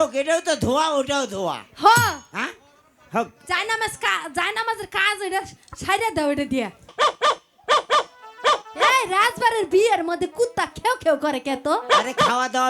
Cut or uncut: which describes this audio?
cut